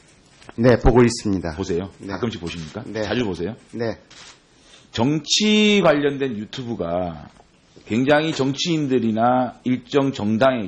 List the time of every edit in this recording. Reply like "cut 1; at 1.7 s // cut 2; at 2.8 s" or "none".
cut 1; at 2.6 s